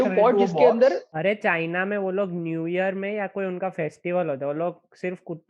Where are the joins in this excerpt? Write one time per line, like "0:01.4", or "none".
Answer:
0:01.1

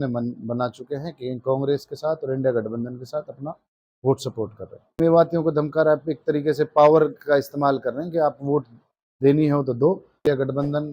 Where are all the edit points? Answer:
0:05.0
0:10.2

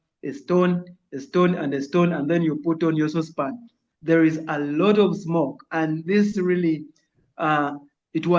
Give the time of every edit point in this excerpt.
0:03.6

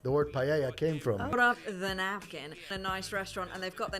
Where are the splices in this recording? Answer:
0:01.3
0:02.7

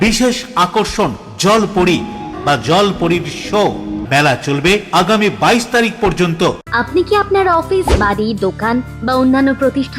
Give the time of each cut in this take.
0:02.3
0:04.0
0:06.6

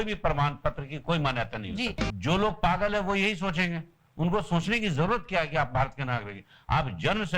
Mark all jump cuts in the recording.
0:02.1

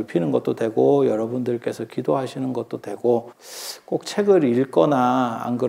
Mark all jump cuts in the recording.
0:03.4

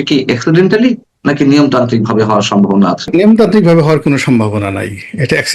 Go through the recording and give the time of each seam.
0:03.1

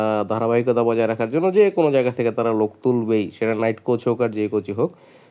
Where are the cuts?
none

